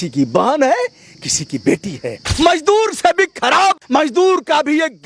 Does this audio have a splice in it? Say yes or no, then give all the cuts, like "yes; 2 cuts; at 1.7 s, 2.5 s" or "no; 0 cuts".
yes; 2 cuts; at 2.2 s, 3.8 s